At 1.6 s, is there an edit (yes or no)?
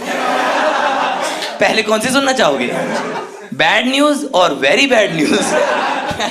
no